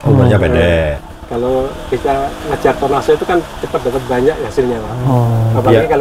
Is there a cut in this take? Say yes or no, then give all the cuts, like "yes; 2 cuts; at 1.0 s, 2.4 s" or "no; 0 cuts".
no; 0 cuts